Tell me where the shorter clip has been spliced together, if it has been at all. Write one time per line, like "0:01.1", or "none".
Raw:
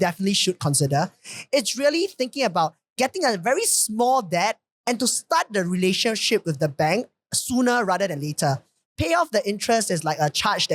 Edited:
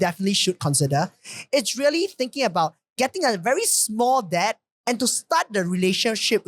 none